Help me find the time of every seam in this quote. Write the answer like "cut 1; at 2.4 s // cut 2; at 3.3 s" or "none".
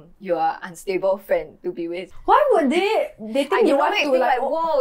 cut 1; at 2.0 s

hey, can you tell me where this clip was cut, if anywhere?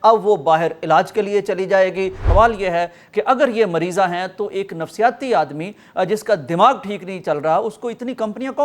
cut 1; at 2.2 s

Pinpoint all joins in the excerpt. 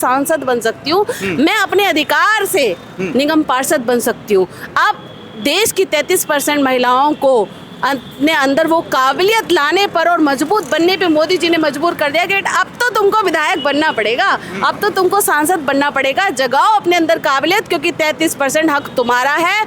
none

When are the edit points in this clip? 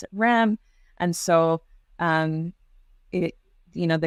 none

